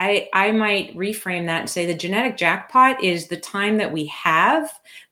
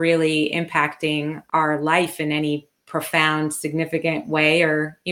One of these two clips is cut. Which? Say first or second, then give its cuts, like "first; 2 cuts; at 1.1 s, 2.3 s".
second; 1 cut; at 1.4 s